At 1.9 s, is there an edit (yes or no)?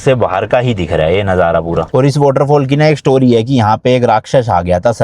yes